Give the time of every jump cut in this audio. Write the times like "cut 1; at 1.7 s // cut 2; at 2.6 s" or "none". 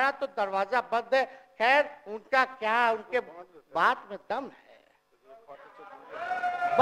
none